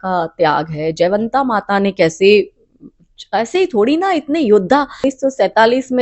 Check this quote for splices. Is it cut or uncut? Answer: cut